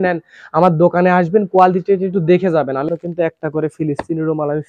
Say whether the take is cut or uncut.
cut